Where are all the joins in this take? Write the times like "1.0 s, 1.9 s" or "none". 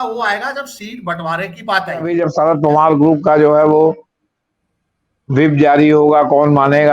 2.1 s